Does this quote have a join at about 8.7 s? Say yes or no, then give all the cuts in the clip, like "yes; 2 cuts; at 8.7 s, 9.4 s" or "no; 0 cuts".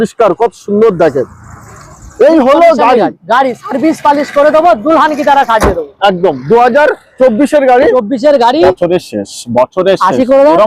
yes; 1 cut; at 8.7 s